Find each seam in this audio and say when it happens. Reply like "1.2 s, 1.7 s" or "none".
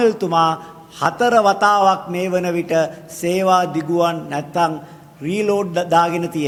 none